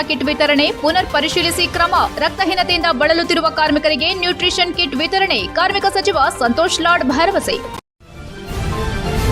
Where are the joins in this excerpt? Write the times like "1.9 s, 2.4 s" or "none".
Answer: 7.7 s